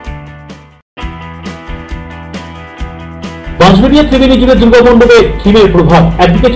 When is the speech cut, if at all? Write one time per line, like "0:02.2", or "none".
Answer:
0:00.9